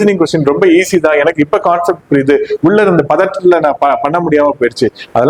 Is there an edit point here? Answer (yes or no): no